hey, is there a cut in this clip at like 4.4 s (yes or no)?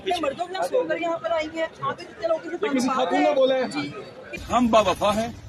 yes